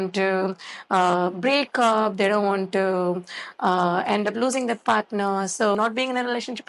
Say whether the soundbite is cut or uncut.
cut